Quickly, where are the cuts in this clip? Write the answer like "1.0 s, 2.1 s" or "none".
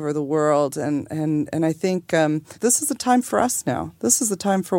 2.5 s